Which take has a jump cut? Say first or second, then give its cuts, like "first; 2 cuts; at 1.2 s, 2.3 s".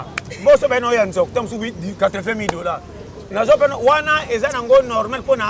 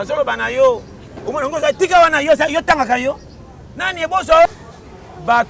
second; 1 cut; at 4.5 s